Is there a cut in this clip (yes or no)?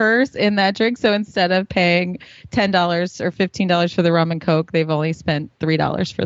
no